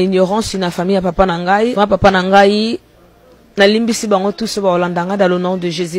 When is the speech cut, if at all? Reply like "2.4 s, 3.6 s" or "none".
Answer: 1.7 s